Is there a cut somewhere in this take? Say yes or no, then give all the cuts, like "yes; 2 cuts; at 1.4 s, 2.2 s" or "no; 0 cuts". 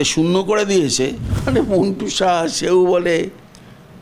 yes; 1 cut; at 1.3 s